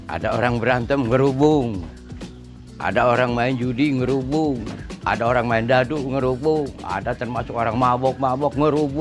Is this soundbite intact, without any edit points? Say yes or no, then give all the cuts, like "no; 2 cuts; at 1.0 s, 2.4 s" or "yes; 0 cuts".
yes; 0 cuts